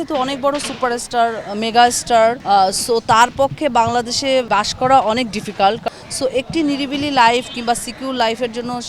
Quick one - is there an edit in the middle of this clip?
yes; 3 cuts; at 2.4 s, 4.5 s, 5.8 s

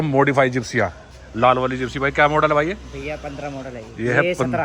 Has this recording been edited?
no; 0 cuts

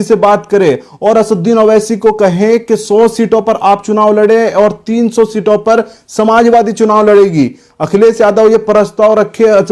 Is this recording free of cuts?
yes; 0 cuts

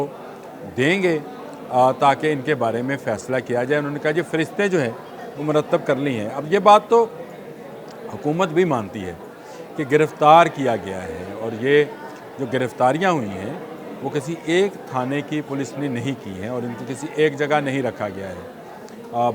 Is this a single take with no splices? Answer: yes; 0 cuts

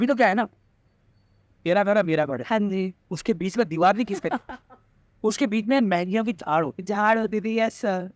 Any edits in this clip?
no; 0 cuts

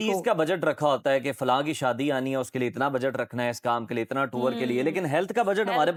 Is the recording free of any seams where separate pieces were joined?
yes; 0 cuts

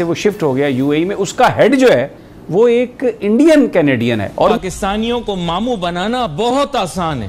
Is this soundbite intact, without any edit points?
no; 1 cut; at 4.6 s

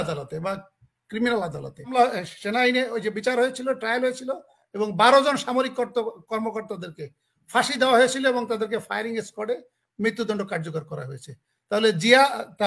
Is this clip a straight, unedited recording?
no; 1 cut; at 1.9 s

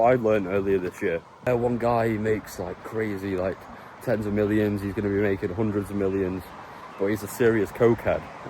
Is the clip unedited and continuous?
no; 1 cut; at 1.5 s

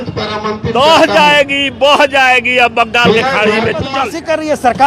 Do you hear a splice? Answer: yes; 1 cut; at 3.9 s

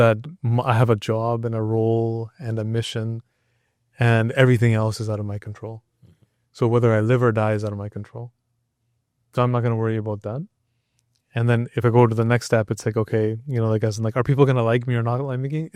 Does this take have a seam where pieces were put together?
no; 0 cuts

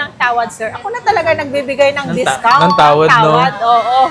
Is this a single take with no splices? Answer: yes; 0 cuts

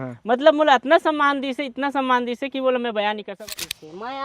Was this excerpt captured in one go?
no; 1 cut; at 3.3 s

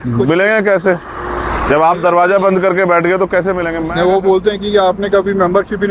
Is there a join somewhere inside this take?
yes; 1 cut; at 3.8 s

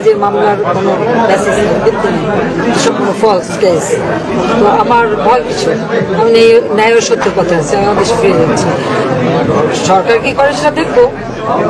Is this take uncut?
yes; 0 cuts

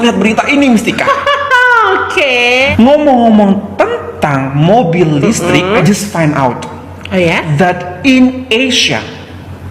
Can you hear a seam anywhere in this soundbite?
no; 0 cuts

